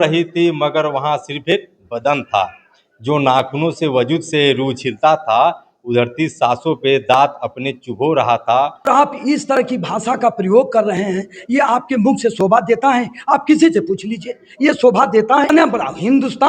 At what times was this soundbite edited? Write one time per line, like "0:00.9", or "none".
0:08.9
0:15.5